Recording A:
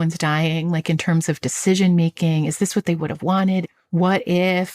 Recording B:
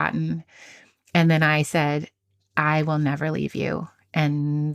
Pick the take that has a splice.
A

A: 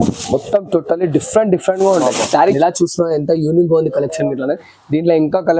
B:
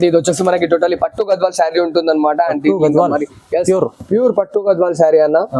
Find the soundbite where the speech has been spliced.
A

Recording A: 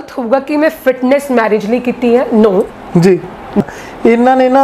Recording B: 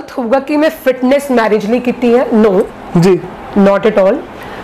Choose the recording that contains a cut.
A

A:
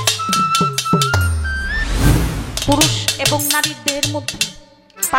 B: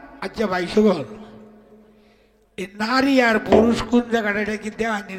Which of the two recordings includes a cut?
A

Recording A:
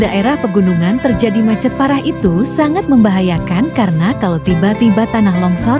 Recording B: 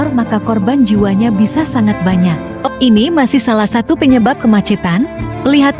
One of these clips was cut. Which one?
B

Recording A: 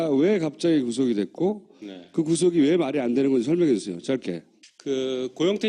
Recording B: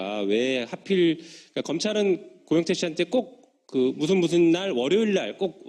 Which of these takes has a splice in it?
B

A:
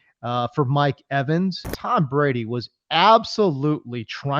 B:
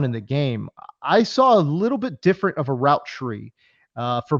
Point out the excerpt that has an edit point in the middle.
A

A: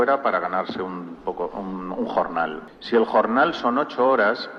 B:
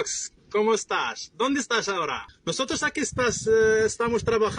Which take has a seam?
B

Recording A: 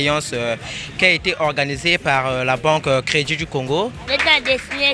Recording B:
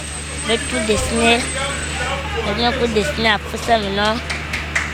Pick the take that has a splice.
A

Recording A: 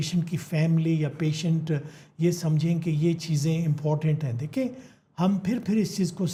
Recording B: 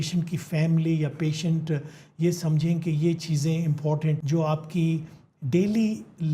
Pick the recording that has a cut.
B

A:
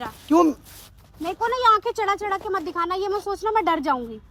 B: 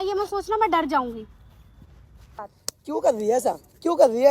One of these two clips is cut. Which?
B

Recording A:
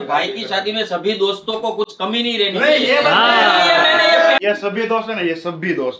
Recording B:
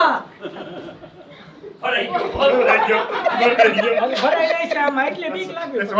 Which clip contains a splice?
A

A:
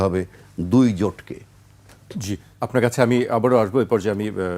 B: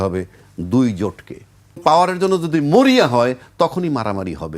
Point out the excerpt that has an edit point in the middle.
B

